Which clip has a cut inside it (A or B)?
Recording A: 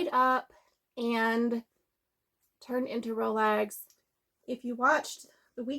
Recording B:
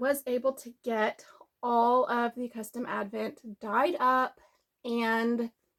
A